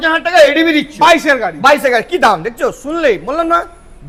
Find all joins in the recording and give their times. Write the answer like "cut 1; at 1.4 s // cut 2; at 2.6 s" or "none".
none